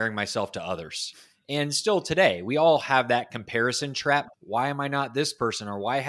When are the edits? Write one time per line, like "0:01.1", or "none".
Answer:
0:04.4